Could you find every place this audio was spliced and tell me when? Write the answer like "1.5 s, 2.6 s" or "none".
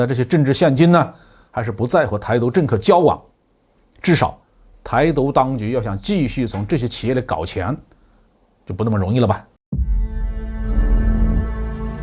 9.5 s